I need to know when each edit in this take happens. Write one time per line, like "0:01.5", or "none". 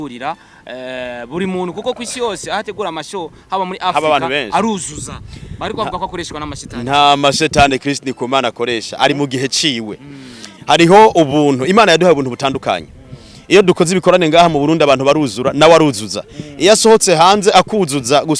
none